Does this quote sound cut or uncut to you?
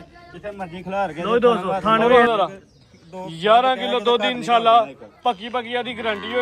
cut